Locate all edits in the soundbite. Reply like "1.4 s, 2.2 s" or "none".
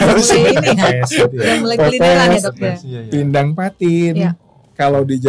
none